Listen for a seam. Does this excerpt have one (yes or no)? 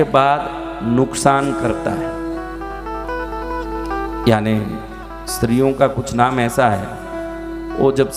no